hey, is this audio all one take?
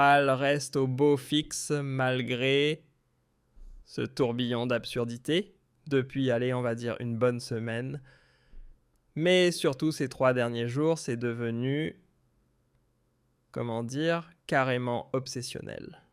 no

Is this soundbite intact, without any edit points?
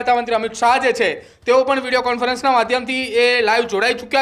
yes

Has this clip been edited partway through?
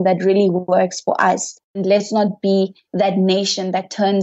yes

